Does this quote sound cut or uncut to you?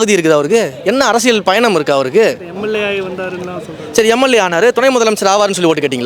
uncut